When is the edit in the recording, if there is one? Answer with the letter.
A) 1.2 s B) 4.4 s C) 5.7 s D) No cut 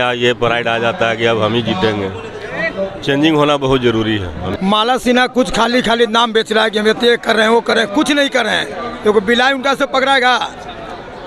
B